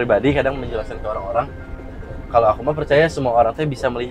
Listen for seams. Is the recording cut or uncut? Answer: uncut